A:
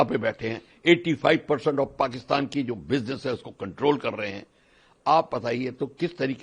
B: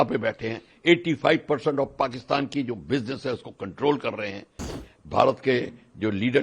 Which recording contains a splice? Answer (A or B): B